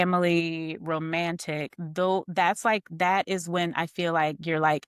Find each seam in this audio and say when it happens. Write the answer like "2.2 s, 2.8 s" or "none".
none